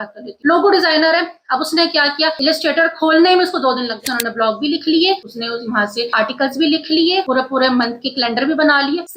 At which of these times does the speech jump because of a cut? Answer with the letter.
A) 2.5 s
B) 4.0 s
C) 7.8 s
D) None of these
B